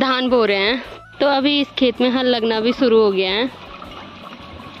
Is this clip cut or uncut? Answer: uncut